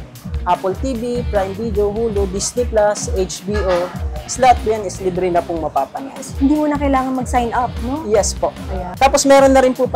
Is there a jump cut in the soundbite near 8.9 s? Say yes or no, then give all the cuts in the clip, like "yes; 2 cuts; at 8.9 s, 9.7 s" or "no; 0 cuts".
yes; 2 cuts; at 4.1 s, 8.9 s